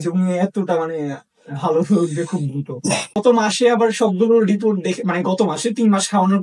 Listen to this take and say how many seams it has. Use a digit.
1